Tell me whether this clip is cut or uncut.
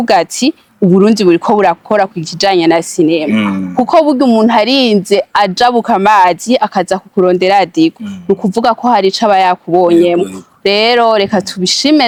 uncut